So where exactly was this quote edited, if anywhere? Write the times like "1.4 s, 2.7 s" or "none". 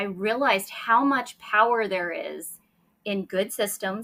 none